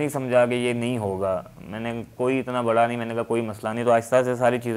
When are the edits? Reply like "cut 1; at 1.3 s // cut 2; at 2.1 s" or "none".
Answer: none